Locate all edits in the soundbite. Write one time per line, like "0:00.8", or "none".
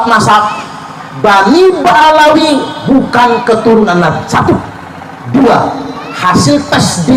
none